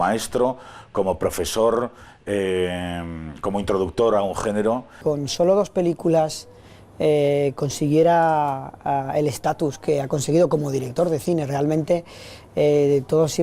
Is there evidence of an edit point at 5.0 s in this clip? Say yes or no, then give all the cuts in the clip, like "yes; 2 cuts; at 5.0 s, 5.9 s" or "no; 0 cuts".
yes; 1 cut; at 5.0 s